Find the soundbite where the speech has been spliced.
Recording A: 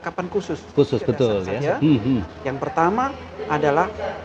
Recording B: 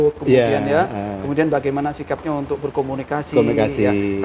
A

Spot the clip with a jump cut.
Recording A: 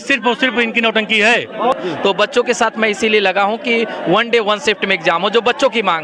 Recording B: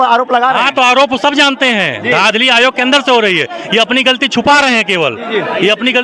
A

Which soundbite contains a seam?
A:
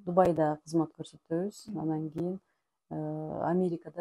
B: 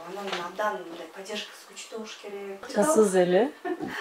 B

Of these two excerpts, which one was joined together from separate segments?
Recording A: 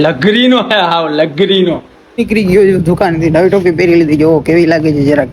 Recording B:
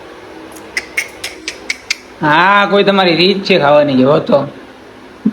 A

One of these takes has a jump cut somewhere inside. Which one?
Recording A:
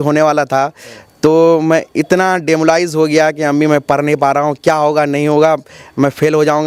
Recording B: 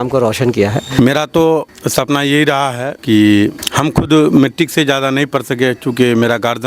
B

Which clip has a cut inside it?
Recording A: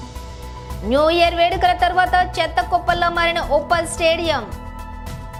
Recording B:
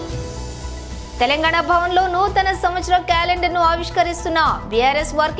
B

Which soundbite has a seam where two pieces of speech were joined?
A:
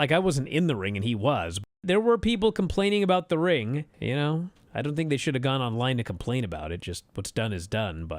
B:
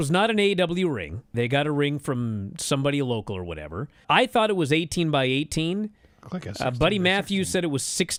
A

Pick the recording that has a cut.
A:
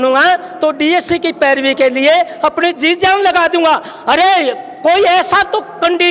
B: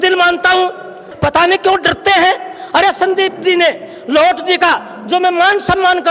B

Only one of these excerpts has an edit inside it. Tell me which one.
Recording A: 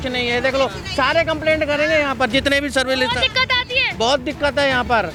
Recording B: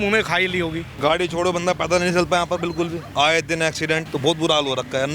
B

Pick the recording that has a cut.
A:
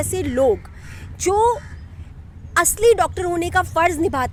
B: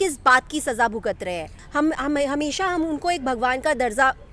B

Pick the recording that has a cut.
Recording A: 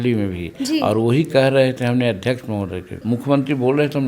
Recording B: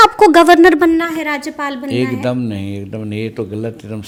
A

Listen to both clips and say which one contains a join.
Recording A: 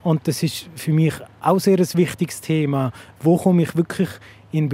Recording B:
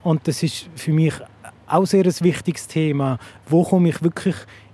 A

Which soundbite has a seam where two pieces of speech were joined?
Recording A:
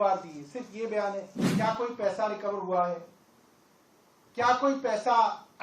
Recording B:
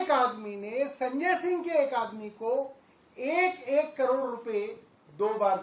A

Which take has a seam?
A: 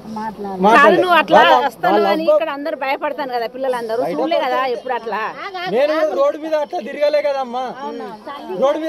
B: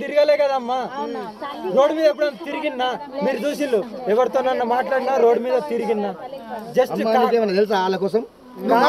A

